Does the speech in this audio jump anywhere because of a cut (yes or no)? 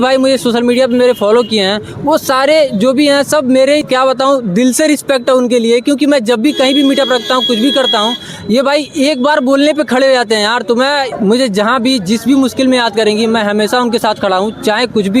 yes